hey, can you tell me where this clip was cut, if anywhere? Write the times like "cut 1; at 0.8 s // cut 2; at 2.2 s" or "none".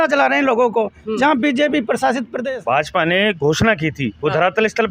cut 1; at 2.3 s